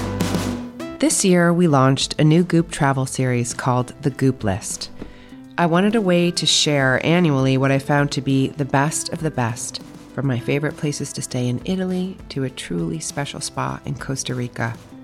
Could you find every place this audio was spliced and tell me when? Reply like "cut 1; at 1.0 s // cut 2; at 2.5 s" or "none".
cut 1; at 0.9 s